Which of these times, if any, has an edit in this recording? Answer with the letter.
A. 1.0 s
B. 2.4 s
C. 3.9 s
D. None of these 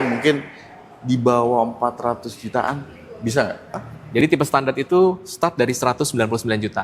C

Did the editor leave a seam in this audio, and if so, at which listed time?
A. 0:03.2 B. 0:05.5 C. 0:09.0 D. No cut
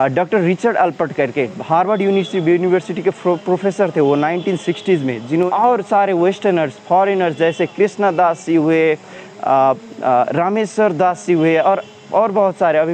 B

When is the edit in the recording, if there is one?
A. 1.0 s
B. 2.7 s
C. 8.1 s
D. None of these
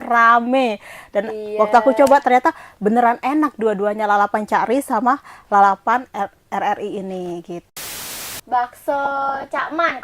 C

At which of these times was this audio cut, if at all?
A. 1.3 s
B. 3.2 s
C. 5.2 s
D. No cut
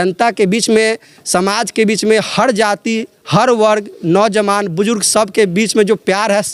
D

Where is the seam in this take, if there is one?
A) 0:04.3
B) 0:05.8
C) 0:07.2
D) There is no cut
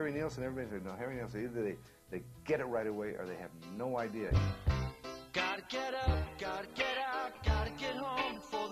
A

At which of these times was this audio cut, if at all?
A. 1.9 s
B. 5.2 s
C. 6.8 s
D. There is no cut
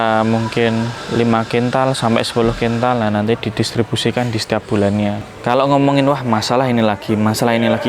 B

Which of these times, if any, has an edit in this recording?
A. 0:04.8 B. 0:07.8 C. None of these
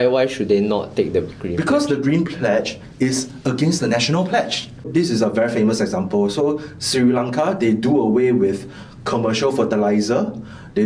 A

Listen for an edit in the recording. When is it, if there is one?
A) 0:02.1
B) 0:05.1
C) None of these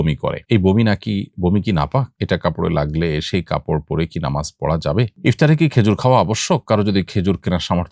B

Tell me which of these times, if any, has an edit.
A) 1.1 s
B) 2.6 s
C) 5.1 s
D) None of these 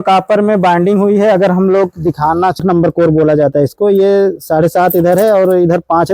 B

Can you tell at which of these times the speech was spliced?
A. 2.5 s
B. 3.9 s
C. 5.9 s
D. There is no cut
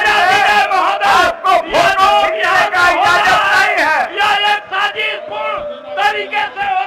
D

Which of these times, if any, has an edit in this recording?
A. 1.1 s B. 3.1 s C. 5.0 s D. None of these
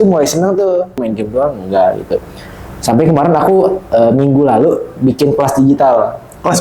A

